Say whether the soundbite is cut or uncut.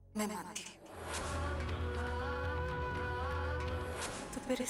uncut